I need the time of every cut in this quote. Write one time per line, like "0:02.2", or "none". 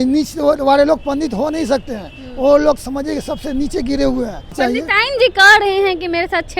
0:04.6

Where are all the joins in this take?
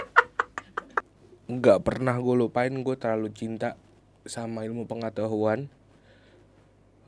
0:01.1

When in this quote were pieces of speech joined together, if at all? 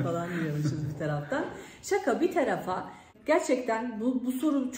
0:03.1

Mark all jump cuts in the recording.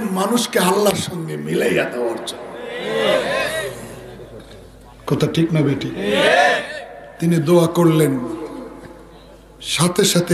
none

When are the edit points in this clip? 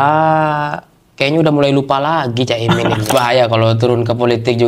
0:03.1

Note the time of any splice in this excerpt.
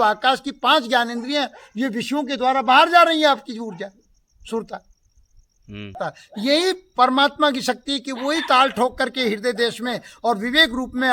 0:05.9

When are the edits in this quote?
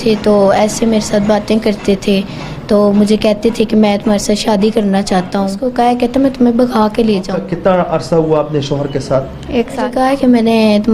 0:05.6
0:07.3
0:09.9

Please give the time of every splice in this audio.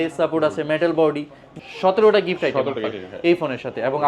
0:01.6

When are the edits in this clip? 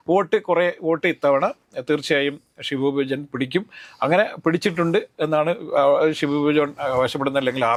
none

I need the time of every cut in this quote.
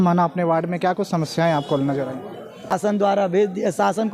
0:02.9

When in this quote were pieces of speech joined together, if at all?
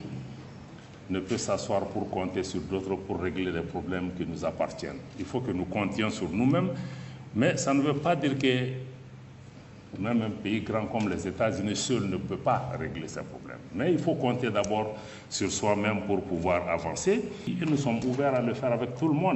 0:17.5

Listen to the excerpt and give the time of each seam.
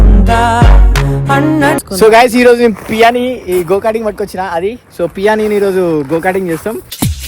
0:01.8

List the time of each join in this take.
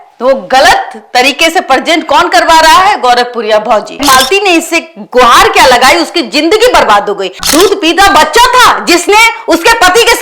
0:04.0
0:07.4

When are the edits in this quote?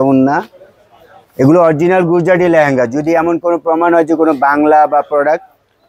0:01.2

